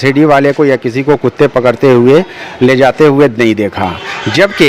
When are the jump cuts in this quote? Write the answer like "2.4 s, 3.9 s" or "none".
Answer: none